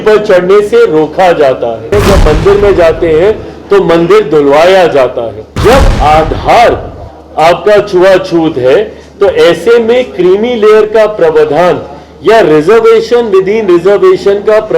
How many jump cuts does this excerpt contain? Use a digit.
2